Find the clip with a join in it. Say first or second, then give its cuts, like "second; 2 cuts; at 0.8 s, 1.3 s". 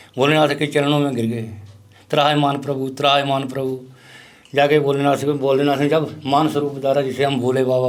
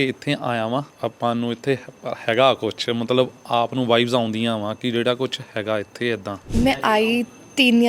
second; 2 cuts; at 0.9 s, 6.4 s